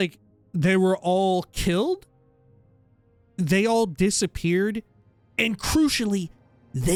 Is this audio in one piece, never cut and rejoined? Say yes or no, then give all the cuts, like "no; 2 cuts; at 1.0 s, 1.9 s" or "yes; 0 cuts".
yes; 0 cuts